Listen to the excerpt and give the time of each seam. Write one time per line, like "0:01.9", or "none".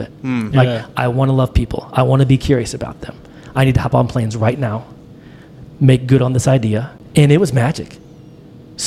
0:07.0